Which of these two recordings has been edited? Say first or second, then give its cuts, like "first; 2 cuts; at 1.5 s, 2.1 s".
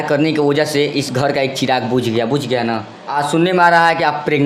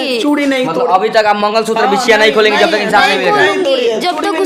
first; 1 cut; at 3.0 s